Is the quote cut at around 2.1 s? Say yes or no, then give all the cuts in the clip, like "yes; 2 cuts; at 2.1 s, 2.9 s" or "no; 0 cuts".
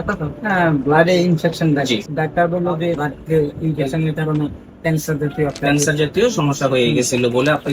yes; 2 cuts; at 2.1 s, 3.0 s